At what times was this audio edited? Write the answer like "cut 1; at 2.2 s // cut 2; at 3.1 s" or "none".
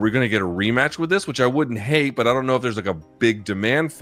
none

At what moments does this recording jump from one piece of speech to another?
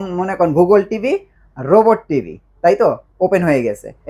none

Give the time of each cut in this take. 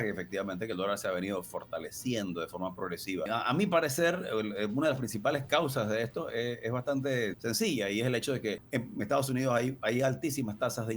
cut 1; at 3.3 s // cut 2; at 7.4 s // cut 3; at 8.6 s

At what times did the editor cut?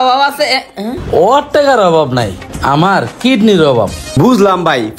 cut 1; at 4.0 s

